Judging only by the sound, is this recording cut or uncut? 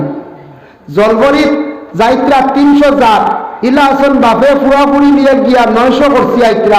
uncut